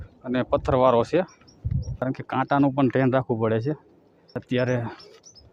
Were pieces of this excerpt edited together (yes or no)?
yes